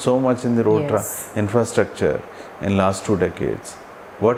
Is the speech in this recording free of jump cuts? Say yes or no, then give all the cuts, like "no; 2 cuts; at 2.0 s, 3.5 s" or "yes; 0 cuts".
yes; 0 cuts